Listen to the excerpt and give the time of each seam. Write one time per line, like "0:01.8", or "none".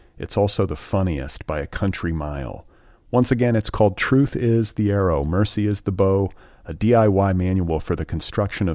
none